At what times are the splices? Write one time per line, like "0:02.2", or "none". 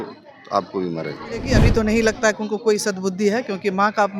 0:01.6